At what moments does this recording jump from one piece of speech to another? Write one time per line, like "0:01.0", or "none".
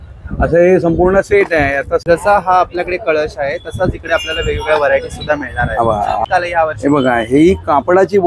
0:02.1
0:06.2